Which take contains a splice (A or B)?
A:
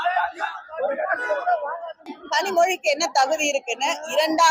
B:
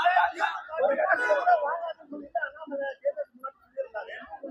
A